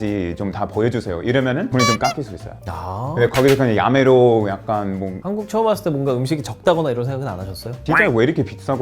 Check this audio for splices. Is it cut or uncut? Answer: cut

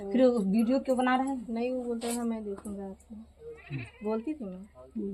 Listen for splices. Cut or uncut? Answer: uncut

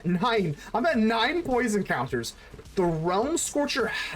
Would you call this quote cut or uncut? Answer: uncut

